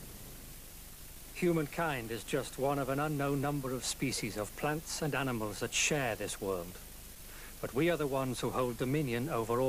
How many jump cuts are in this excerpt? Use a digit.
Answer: 0